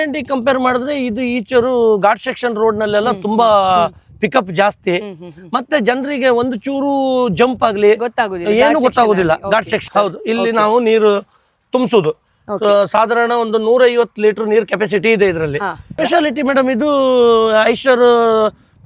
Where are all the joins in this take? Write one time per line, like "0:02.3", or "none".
0:09.8
0:15.9

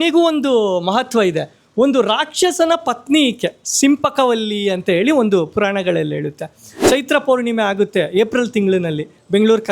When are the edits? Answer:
0:06.8

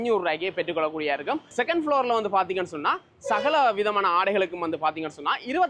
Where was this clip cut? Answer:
0:01.5

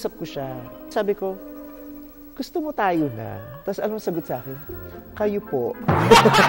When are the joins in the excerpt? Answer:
0:00.9

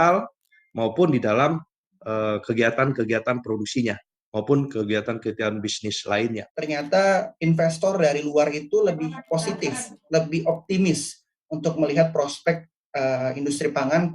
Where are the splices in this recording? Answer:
0:06.6

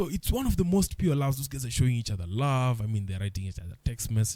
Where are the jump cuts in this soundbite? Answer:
none

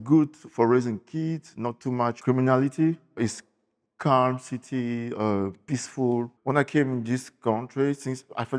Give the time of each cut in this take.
0:02.2
0:03.2
0:06.3

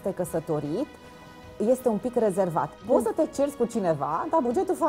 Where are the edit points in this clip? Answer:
0:02.8

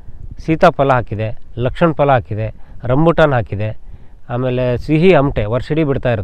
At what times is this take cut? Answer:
none

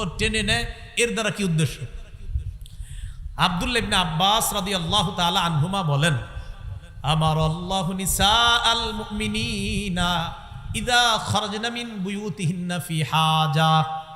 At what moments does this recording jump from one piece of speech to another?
none

